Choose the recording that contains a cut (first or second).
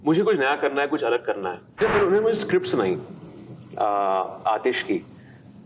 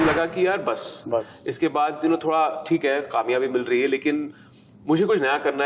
first